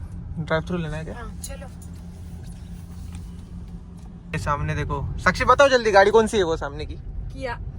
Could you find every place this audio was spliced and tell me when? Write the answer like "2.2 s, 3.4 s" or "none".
4.3 s